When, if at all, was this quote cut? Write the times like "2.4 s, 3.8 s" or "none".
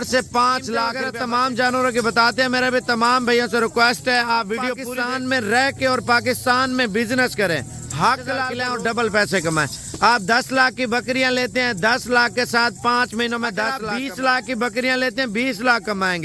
1.0 s, 4.8 s, 8.5 s, 13.8 s